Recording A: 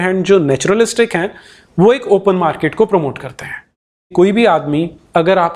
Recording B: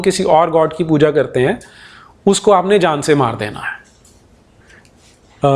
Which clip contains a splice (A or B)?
A